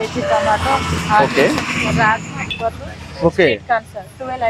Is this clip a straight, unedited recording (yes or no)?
no